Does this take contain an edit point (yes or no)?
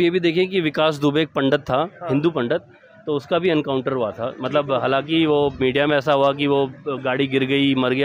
no